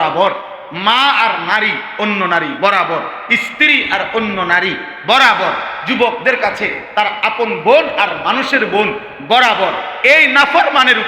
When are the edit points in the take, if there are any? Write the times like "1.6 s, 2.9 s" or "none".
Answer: none